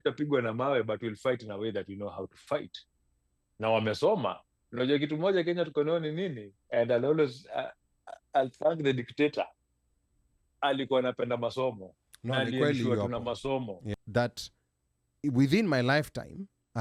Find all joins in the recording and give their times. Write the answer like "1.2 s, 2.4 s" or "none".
13.8 s